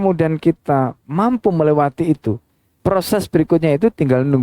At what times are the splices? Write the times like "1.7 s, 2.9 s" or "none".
2.7 s